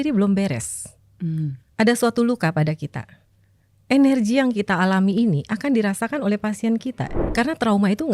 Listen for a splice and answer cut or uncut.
cut